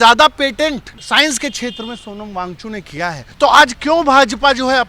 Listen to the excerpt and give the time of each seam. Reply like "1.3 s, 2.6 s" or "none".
0.9 s, 3.2 s